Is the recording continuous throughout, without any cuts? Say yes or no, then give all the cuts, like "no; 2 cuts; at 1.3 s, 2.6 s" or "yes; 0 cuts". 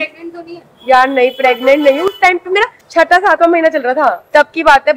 yes; 0 cuts